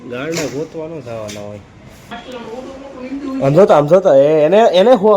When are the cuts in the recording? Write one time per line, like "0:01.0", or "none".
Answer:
0:02.1